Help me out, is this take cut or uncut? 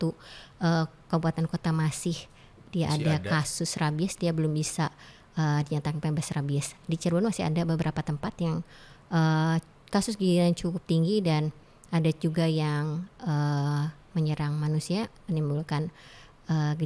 uncut